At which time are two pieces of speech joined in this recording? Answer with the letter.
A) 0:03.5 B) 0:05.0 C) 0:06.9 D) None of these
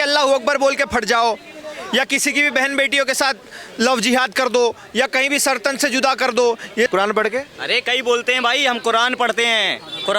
C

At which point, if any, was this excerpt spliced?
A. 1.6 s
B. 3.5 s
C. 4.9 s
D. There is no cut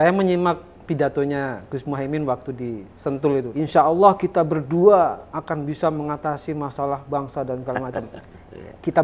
B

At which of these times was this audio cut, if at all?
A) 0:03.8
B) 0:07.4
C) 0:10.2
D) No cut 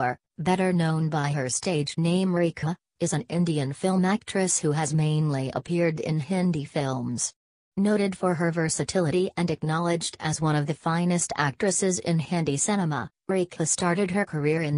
C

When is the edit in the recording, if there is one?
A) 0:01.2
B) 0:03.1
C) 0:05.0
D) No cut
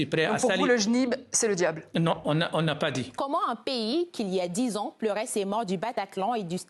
B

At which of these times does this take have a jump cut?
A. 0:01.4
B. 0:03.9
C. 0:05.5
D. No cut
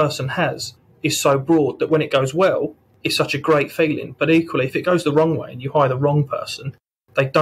D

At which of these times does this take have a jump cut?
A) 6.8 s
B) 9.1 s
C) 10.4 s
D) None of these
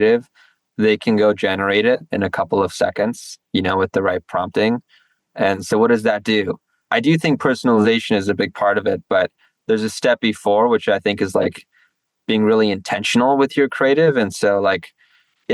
A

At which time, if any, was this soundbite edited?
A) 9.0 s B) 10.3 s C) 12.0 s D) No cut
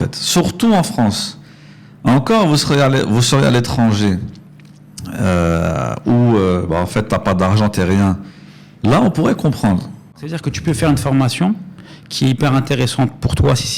B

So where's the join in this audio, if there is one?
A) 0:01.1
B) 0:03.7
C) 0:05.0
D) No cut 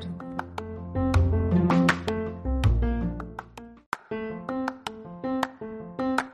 B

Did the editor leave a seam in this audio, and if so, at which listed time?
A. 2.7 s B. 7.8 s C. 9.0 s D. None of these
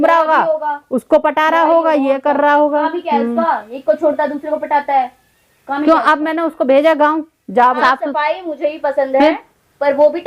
B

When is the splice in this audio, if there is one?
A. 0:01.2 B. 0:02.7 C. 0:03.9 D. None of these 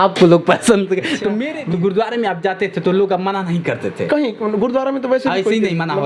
A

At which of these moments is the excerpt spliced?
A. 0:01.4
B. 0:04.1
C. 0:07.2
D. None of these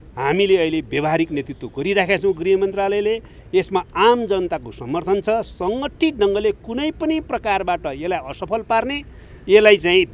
D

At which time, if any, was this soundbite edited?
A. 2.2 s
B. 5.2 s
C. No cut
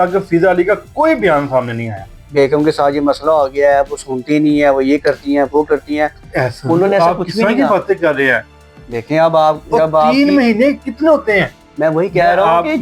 A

